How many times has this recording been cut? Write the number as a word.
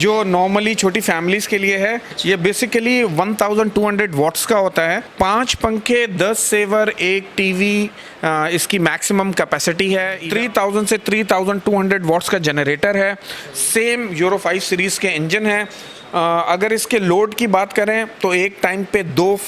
three